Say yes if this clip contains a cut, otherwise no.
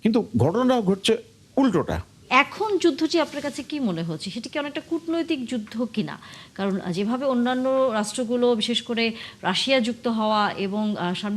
yes